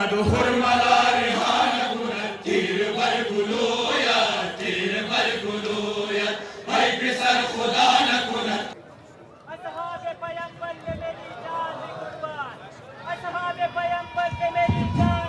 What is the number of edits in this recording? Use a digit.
1